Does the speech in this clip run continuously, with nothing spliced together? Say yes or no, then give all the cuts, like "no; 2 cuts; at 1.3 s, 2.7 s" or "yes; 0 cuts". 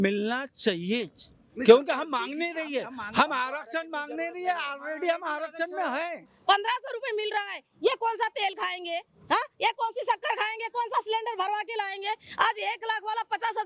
no; 1 cut; at 6.3 s